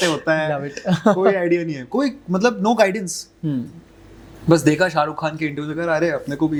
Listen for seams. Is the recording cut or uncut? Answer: uncut